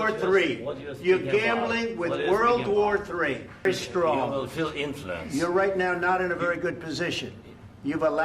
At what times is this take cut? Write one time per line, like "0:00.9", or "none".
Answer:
0:03.6